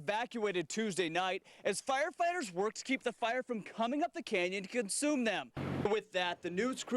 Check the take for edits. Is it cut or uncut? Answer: cut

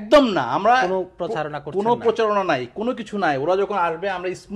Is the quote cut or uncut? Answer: uncut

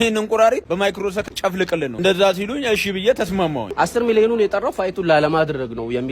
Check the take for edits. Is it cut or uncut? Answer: cut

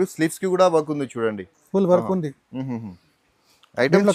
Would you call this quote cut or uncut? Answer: uncut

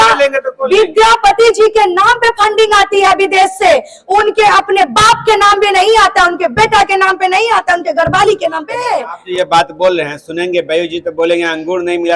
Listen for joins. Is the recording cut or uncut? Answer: cut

